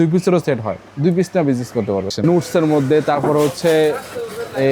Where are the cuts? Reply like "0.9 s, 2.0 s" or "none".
2.2 s